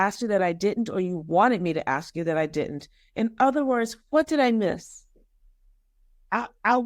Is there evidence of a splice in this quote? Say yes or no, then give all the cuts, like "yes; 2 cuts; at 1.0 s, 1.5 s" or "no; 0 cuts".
no; 0 cuts